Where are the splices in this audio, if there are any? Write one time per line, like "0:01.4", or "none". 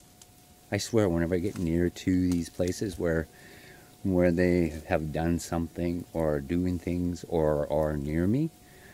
none